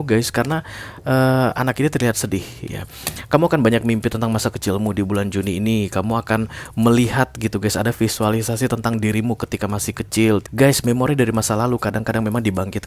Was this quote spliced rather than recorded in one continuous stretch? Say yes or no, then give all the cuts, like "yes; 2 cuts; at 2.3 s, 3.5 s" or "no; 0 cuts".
yes; 1 cut; at 10.5 s